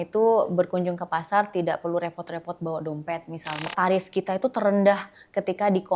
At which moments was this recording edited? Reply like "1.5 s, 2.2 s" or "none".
3.7 s